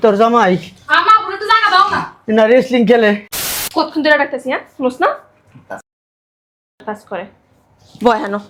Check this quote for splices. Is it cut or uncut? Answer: cut